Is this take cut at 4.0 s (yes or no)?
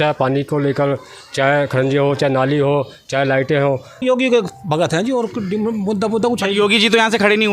yes